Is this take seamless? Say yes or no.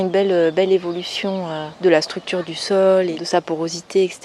no